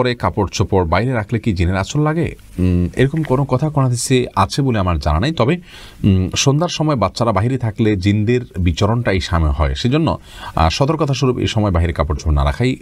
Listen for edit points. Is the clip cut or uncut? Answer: uncut